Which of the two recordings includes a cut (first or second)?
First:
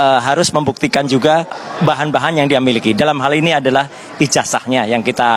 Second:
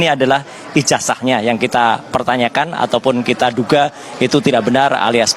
first